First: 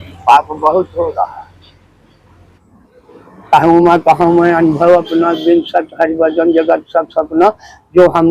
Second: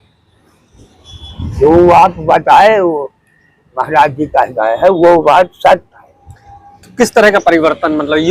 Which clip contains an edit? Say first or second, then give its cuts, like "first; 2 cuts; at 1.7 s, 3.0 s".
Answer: first; 1 cut; at 2.5 s